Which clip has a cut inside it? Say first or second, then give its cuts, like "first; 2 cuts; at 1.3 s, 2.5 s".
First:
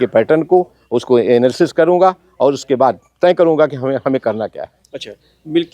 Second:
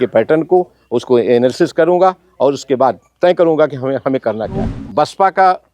second; 1 cut; at 4.8 s